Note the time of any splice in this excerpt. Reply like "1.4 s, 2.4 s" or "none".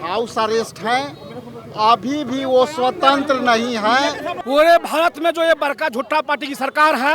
4.3 s